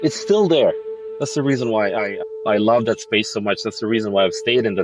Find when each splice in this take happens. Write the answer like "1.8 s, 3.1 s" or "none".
0.9 s